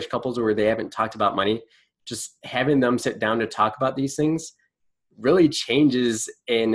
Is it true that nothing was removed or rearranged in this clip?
yes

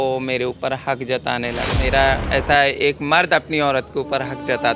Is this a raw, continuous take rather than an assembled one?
no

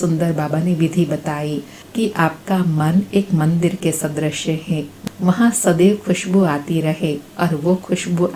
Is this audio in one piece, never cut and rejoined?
yes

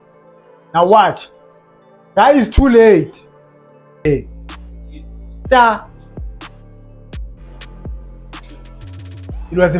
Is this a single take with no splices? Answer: no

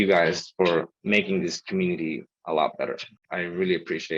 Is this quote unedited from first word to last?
no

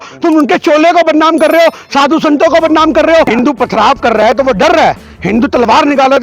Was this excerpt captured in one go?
no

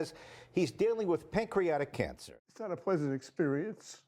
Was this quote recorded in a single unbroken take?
no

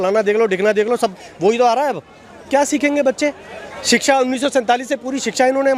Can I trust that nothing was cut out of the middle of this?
yes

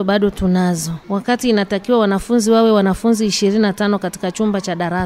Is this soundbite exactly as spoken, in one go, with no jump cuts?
no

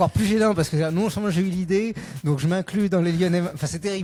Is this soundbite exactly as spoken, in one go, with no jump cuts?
yes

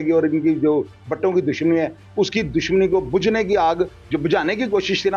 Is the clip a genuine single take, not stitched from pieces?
yes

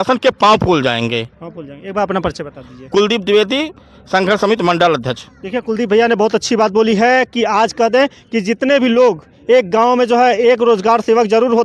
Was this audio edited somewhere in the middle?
no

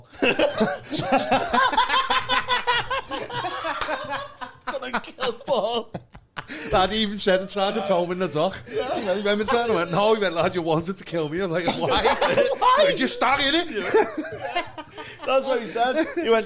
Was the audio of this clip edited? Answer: no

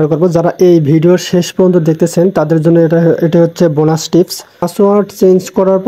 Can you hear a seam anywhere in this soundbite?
yes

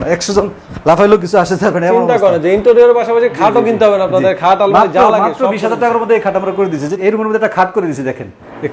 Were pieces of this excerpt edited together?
yes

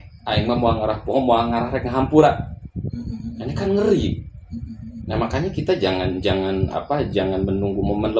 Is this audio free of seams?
yes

